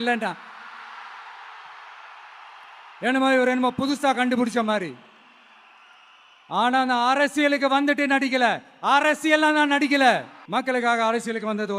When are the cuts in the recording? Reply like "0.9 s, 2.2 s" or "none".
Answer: 10.4 s